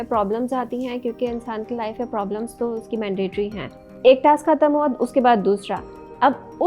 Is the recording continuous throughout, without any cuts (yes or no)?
no